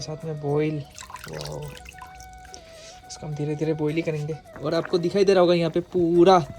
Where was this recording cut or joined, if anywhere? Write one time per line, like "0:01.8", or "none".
0:04.5